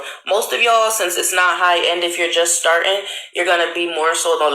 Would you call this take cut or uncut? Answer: cut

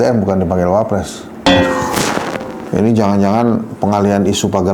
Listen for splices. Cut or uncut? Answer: cut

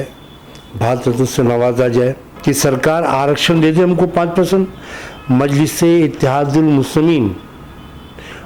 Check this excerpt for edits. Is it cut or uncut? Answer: cut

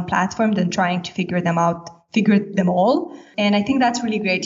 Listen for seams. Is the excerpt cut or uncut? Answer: cut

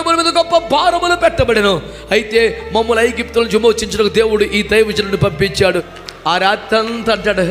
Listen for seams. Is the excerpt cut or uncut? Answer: cut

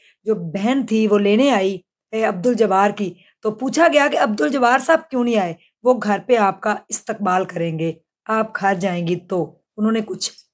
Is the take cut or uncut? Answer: uncut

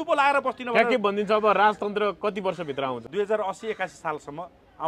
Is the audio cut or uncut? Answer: cut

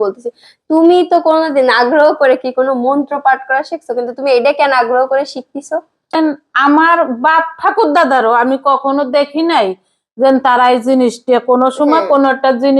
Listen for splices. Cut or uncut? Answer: cut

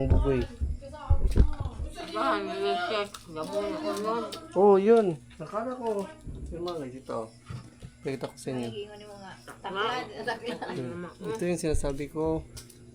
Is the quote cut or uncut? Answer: uncut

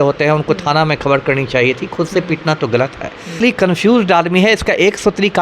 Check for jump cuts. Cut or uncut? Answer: cut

